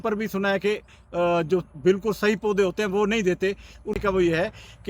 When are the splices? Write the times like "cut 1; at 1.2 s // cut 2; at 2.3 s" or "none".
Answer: cut 1; at 4.0 s